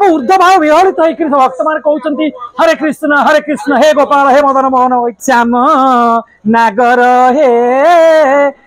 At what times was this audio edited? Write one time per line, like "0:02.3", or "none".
0:05.1